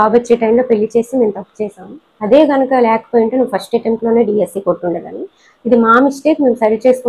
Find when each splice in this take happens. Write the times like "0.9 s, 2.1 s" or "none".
none